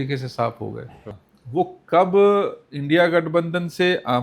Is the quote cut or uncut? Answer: cut